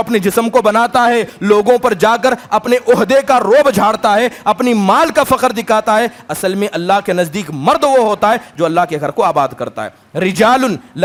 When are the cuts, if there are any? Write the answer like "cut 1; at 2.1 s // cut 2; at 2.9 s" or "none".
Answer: none

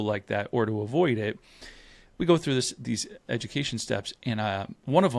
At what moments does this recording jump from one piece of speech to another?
none

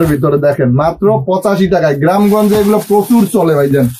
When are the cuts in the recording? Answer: none

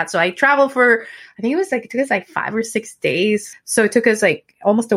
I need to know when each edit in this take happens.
cut 1; at 3.5 s

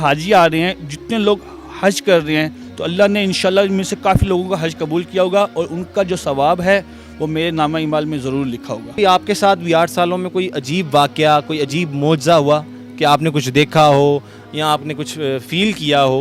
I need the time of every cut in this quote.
none

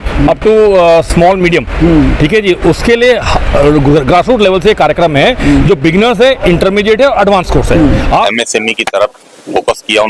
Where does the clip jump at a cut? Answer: cut 1; at 8.1 s

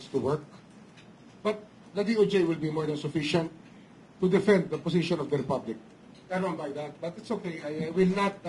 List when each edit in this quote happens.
cut 1; at 6.1 s

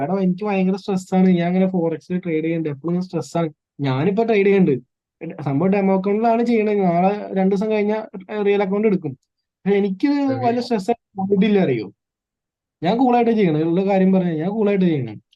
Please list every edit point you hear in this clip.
none

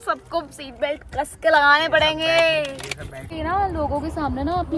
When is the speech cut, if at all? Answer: cut 1; at 3.3 s

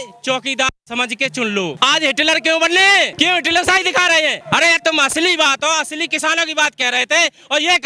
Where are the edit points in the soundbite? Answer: cut 1; at 1.7 s // cut 2; at 3.1 s // cut 3; at 4.4 s

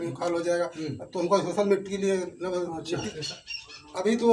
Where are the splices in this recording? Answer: cut 1; at 3.1 s

